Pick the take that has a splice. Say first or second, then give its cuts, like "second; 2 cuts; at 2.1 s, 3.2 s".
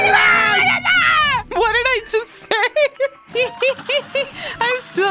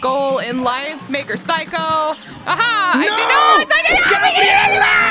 first; 1 cut; at 1.5 s